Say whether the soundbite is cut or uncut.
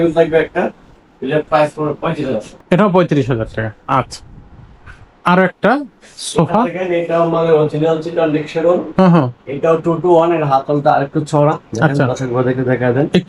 uncut